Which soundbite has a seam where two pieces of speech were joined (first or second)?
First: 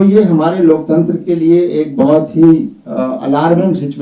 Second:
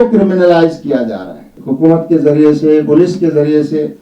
second